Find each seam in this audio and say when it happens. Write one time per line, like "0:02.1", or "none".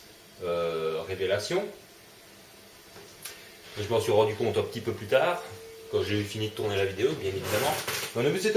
0:07.4